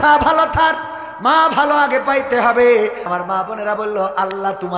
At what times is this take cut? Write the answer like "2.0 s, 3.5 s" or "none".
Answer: 3.1 s